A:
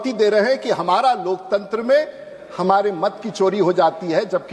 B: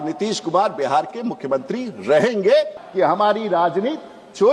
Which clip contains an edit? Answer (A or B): B